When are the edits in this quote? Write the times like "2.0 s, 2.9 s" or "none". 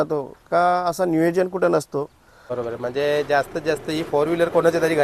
2.4 s